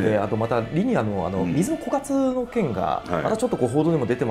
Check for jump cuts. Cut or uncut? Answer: uncut